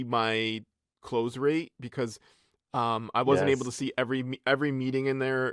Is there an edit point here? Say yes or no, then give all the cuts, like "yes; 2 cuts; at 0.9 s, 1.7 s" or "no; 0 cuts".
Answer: no; 0 cuts